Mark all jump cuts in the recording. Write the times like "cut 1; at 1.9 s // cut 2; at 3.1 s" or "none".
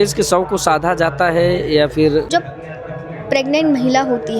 cut 1; at 2.3 s